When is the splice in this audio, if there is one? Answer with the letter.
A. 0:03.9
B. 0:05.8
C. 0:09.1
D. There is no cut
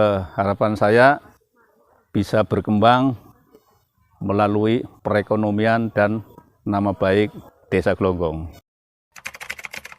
C